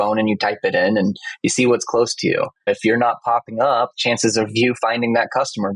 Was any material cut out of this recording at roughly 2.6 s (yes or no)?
yes